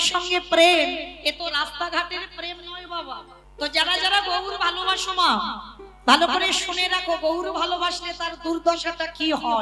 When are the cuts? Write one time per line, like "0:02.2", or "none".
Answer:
0:03.4